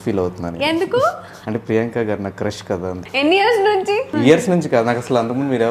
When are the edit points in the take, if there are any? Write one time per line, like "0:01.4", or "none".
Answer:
0:01.3
0:03.0
0:04.1